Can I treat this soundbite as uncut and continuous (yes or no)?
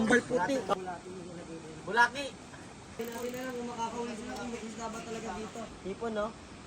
no